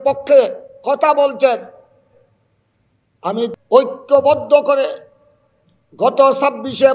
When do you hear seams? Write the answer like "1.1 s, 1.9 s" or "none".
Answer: 3.5 s